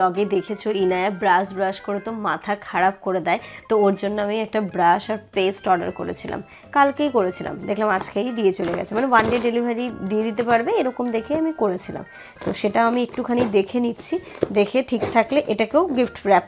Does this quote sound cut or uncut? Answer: uncut